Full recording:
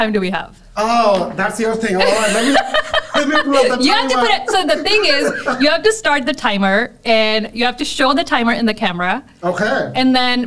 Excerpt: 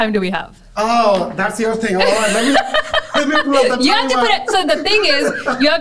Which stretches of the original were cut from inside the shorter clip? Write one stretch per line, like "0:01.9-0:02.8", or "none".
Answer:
none